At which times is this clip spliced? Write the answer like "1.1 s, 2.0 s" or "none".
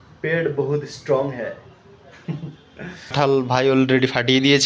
3.1 s